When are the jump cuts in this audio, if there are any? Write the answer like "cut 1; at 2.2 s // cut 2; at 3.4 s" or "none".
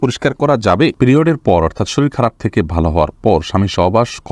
cut 1; at 0.9 s